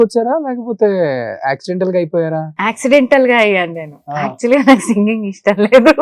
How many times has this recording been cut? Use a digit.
0